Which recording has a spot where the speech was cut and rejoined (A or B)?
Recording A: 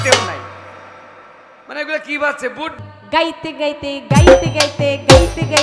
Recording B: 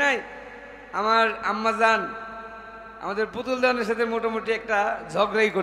A